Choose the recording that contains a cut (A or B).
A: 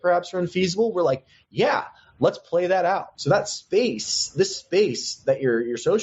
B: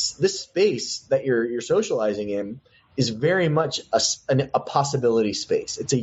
A